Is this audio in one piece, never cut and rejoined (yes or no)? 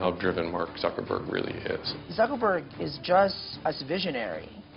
no